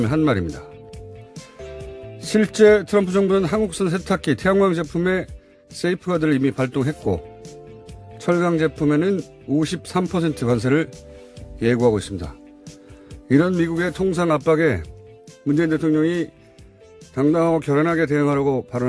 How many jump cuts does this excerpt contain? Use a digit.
0